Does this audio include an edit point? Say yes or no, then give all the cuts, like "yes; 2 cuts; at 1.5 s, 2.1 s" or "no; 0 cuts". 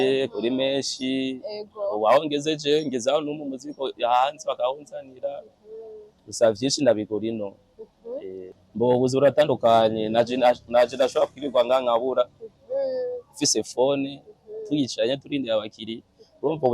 yes; 1 cut; at 8.6 s